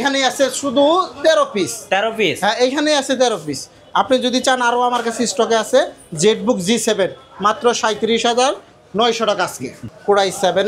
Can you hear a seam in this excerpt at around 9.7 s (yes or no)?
yes